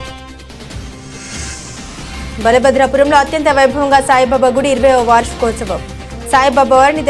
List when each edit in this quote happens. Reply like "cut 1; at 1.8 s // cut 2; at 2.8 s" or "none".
cut 1; at 2.0 s